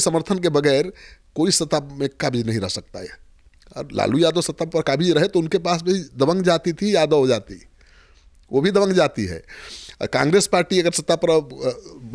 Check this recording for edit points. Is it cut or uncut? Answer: uncut